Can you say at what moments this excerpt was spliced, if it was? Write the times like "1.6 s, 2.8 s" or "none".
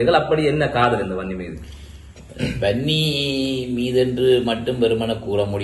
none